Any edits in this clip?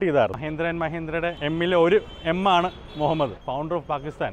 yes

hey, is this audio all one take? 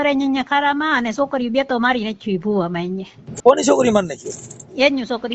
no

